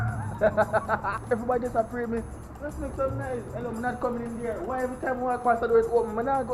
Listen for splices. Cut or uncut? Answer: cut